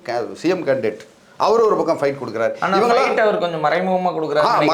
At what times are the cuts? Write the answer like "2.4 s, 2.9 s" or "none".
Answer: none